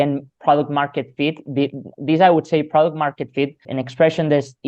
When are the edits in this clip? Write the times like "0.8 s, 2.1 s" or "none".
3.7 s